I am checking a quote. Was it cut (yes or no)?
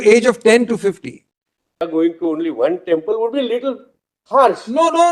yes